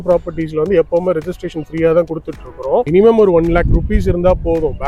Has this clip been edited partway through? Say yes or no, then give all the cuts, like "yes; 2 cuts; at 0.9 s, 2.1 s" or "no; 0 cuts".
yes; 1 cut; at 2.9 s